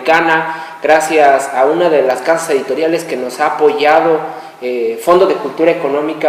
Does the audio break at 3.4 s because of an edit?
no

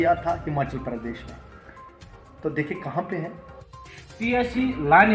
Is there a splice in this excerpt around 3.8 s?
yes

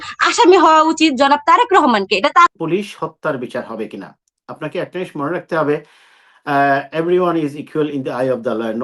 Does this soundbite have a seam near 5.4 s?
no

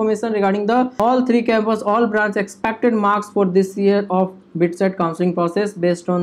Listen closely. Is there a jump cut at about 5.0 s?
no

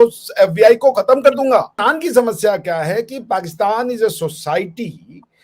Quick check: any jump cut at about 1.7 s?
yes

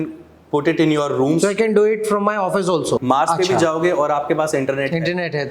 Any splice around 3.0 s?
yes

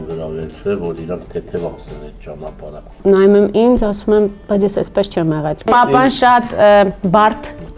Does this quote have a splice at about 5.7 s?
yes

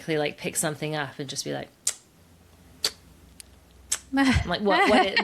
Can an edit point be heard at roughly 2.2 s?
no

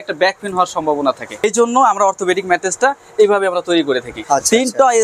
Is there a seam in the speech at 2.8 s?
no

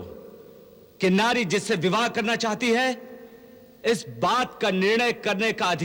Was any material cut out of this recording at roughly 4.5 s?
no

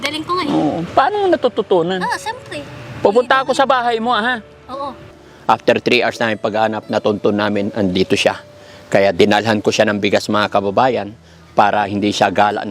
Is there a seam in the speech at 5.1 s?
yes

